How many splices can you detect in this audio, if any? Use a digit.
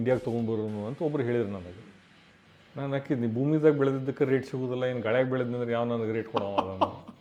0